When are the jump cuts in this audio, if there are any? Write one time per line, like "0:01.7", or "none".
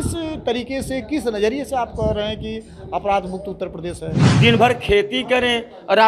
0:04.2